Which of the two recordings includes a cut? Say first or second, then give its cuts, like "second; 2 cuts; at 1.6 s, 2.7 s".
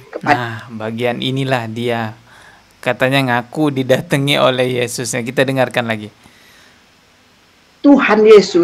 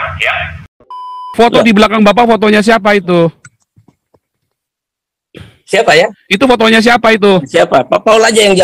second; 1 cut; at 1.2 s